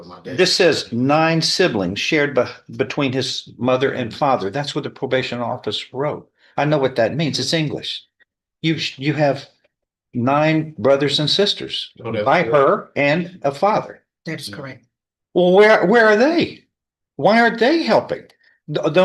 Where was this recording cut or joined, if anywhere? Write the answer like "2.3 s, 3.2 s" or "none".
none